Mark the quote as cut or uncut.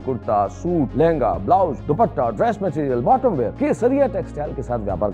cut